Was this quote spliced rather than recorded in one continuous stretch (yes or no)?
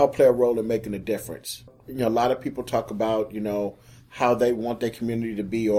yes